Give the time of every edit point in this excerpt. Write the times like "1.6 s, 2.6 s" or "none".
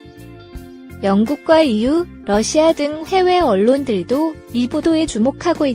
1.0 s